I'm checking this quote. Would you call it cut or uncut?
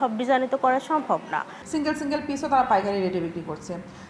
cut